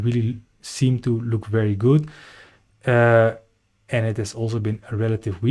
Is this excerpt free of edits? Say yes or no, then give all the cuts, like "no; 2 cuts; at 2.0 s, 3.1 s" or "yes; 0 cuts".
yes; 0 cuts